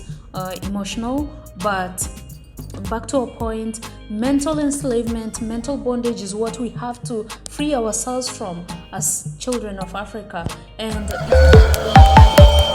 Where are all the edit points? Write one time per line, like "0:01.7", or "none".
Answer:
0:11.1